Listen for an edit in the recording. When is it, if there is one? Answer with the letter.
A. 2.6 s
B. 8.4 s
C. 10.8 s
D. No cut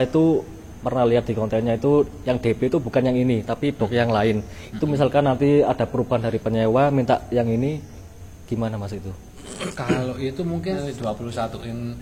C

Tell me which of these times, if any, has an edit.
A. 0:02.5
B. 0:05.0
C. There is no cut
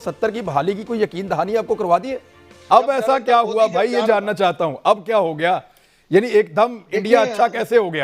A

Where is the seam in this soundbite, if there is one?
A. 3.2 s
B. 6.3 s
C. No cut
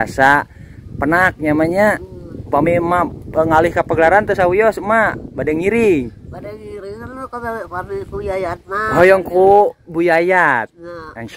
C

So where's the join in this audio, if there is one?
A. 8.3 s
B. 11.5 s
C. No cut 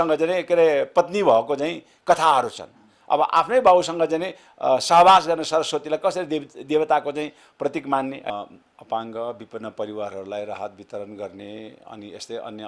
A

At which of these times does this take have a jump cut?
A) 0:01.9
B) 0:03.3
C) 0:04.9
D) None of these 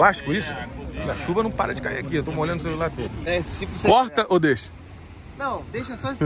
B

